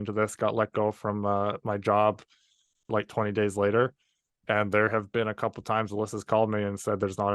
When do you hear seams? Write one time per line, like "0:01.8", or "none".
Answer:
0:02.9